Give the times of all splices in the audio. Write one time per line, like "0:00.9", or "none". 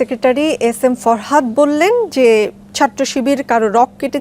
none